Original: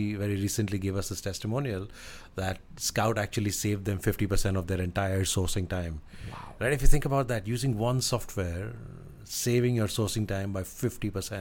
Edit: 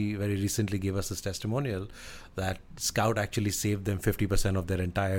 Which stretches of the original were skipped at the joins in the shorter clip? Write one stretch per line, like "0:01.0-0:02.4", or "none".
none